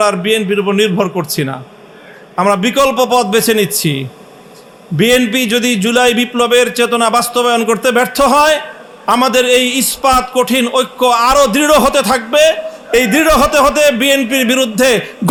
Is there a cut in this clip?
no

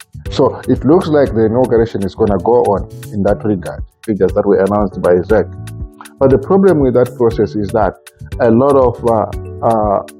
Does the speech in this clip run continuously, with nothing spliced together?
no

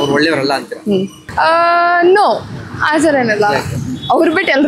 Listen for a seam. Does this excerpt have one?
yes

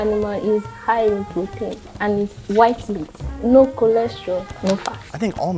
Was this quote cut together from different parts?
no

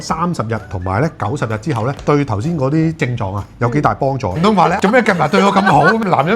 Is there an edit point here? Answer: yes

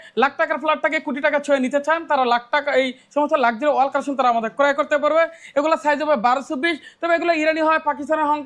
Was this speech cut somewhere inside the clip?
no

